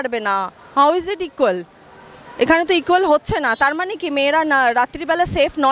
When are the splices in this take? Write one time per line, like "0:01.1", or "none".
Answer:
none